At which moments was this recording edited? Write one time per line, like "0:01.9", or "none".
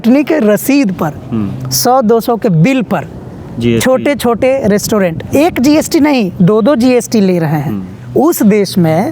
none